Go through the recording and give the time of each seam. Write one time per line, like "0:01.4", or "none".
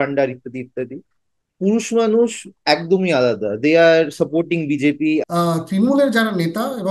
0:05.2